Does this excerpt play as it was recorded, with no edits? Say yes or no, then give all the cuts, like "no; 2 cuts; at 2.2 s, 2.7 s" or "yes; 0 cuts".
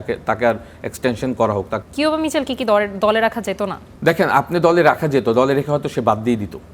no; 2 cuts; at 1.7 s, 3.8 s